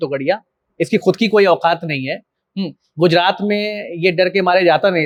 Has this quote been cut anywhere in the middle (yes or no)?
no